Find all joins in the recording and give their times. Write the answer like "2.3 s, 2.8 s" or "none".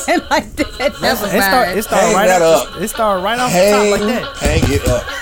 4.3 s